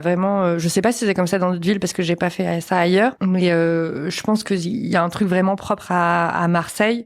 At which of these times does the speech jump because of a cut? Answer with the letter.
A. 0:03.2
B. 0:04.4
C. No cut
A